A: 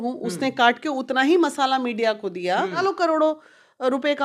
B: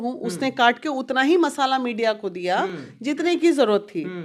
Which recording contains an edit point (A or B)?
A